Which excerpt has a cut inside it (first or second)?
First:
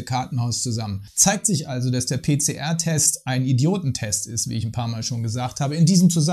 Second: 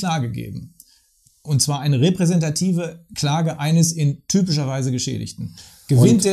first